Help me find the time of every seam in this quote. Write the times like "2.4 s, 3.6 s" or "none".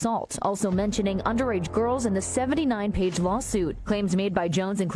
none